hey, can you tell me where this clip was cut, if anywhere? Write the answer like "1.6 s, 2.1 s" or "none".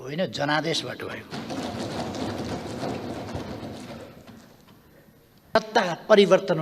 5.5 s